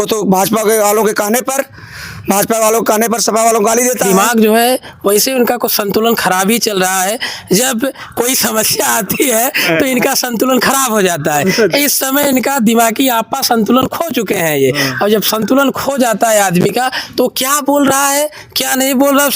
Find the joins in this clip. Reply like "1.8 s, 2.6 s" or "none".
4.0 s